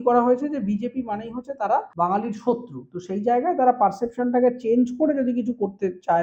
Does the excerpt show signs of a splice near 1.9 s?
yes; 1 cut; at 1.9 s

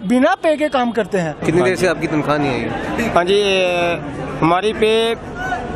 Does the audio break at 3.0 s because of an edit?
no; 1 cut; at 1.4 s

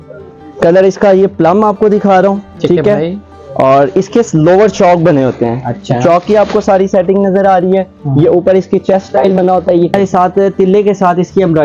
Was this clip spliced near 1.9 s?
no; 1 cut; at 9.9 s

